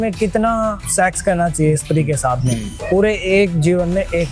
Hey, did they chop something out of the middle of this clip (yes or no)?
yes